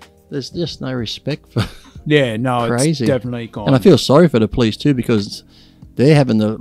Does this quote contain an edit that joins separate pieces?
no; 0 cuts

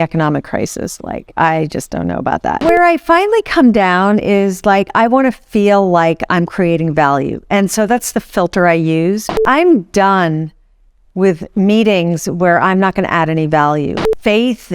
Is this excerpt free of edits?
no; 3 cuts; at 2.6 s, 9.4 s, 13.9 s

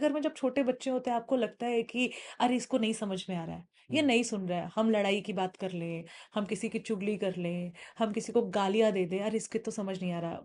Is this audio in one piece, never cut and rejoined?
yes; 0 cuts

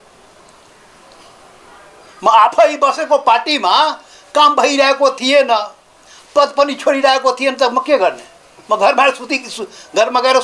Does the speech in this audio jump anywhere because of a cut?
no; 0 cuts

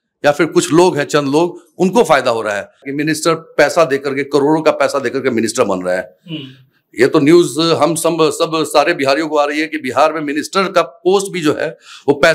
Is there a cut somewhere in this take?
yes; 1 cut; at 2.9 s

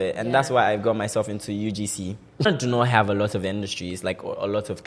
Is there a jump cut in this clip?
yes; 1 cut; at 2.5 s

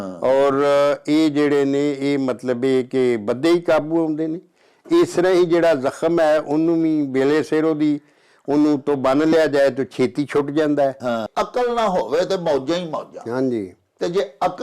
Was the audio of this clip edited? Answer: yes; 1 cut; at 11.3 s

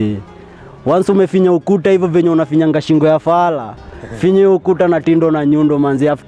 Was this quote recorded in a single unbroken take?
yes; 0 cuts

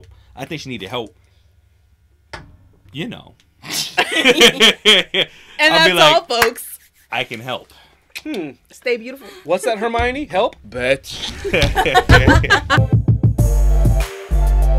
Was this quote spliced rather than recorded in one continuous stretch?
yes; 1 cut; at 12.8 s

